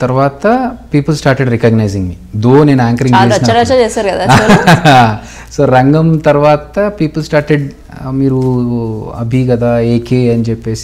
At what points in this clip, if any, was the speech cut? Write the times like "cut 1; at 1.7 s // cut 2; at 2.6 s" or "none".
none